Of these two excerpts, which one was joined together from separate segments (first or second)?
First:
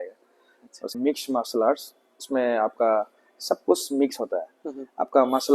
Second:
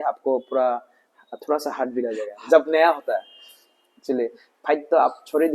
first